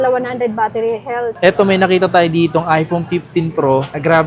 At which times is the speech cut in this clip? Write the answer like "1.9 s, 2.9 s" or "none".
1.3 s